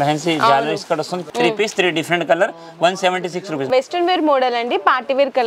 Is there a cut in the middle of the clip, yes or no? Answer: yes